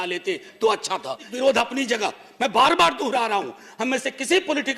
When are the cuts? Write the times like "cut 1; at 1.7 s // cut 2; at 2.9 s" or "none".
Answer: none